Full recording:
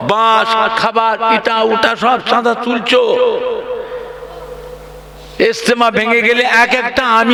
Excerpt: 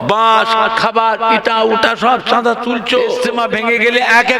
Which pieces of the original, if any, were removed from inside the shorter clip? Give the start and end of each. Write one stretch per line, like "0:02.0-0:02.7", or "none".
0:03.3-0:05.8

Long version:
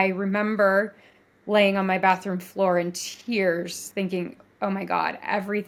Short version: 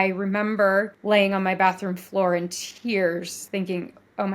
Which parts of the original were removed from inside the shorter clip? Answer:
0:01.0-0:01.4

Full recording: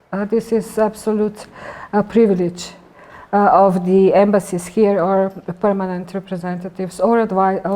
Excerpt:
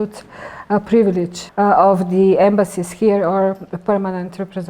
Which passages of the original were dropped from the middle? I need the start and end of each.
0:02.6-0:03.1

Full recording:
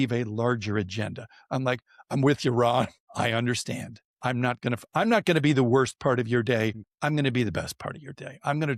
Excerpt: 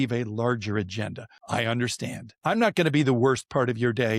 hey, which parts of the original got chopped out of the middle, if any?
0:01.4-0:03.0
0:04.0-0:04.8

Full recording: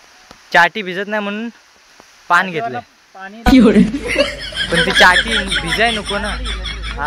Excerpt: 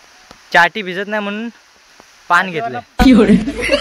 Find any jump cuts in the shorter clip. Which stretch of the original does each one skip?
0:02.9-0:03.3

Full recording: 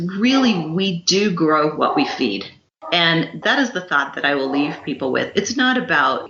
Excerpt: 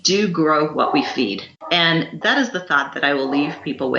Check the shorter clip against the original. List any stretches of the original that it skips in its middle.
0:02.5-0:02.7

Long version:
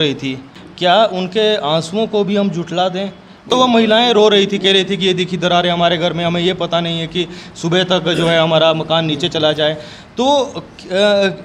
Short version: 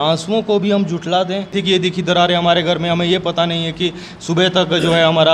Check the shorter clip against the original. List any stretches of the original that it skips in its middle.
0:03.2-0:04.9

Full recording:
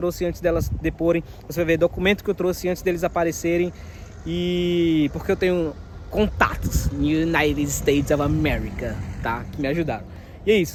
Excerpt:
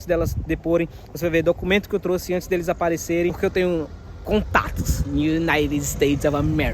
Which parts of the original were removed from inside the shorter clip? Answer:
0:03.7-0:05.2

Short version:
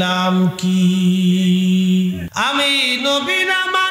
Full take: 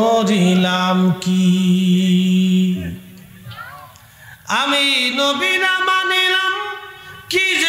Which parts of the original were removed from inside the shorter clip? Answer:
0:02.9-0:04.4

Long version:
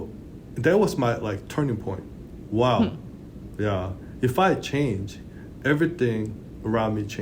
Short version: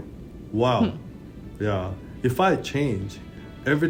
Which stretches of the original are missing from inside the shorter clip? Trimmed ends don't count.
none

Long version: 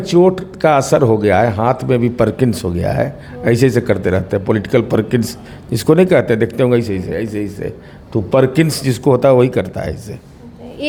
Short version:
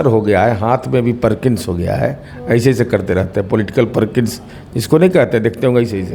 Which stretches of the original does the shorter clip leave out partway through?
none

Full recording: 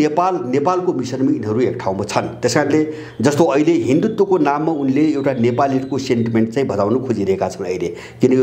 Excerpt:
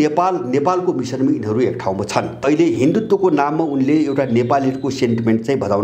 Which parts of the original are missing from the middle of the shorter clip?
0:02.4-0:03.5

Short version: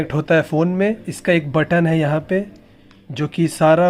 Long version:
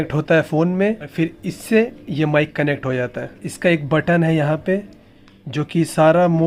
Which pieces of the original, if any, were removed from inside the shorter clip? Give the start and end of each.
0:01.0-0:03.4

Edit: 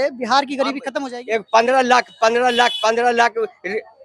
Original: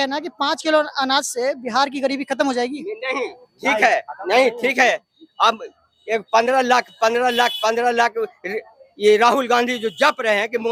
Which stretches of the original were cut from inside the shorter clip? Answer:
0:02.4-0:05.7

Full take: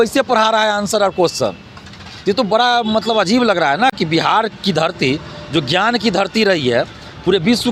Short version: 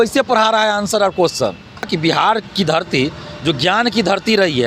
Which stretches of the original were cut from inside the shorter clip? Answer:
0:01.9-0:04.0

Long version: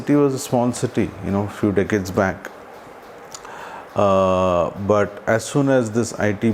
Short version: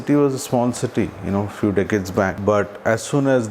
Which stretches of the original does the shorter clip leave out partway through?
0:02.4-0:04.8

